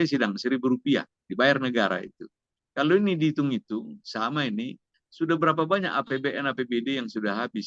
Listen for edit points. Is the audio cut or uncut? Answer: uncut